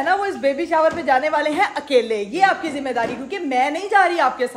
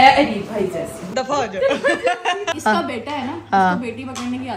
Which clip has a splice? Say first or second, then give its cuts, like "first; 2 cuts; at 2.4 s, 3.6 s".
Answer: second; 2 cuts; at 1.1 s, 2.5 s